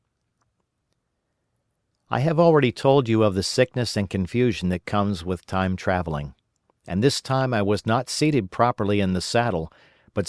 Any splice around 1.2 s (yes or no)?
no